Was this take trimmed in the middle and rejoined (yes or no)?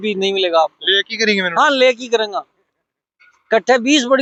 no